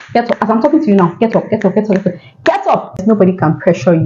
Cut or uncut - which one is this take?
cut